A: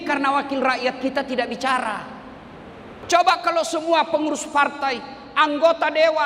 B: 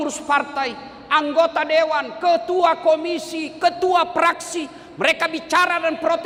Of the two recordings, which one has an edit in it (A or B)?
A